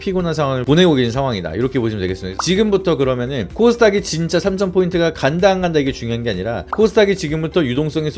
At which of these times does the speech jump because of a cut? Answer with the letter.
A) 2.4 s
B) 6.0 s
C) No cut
A